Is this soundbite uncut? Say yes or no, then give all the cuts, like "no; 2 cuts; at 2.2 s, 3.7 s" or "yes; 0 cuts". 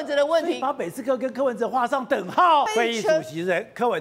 no; 1 cut; at 2.7 s